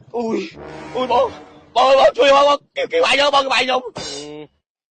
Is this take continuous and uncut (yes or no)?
yes